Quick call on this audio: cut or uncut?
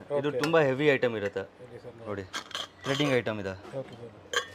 cut